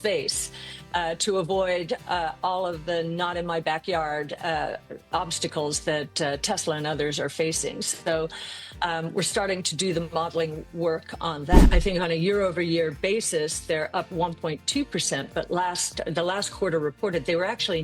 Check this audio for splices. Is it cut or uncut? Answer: cut